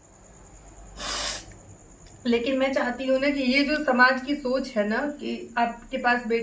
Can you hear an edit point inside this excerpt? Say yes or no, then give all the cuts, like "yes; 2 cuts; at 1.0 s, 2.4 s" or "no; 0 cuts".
no; 0 cuts